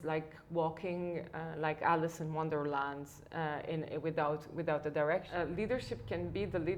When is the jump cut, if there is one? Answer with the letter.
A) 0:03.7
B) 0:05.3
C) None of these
B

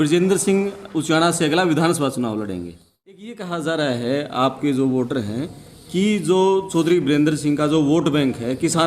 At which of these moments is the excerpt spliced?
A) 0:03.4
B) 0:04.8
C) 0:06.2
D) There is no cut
A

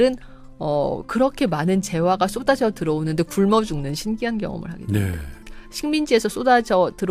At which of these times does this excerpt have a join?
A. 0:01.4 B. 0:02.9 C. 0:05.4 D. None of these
C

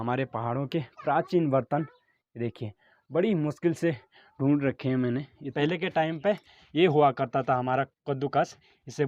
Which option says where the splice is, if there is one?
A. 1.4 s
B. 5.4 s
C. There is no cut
B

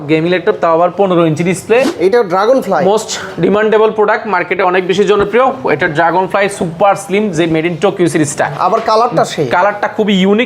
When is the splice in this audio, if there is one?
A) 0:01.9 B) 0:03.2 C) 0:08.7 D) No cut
A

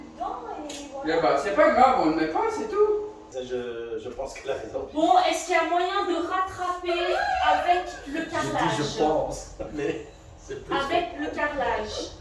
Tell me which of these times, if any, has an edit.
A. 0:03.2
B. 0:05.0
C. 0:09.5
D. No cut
A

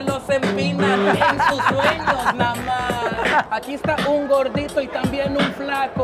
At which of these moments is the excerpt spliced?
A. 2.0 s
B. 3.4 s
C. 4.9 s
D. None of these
B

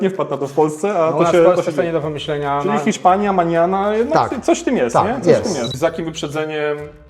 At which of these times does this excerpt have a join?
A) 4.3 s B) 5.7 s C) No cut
B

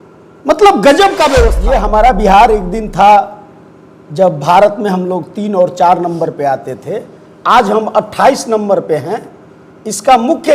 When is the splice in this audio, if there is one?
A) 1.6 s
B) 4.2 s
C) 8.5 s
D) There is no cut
A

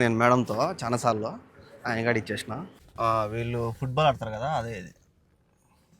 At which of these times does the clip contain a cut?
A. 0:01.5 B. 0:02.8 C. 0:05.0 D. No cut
B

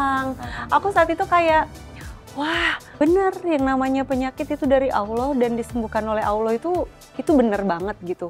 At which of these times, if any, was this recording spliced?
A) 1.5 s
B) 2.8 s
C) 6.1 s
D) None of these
B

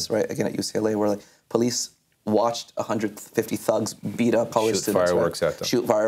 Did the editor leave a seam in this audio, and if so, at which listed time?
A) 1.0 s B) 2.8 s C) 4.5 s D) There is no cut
C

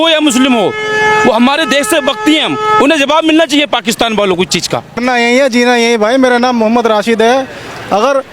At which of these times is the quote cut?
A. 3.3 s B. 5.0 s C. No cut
B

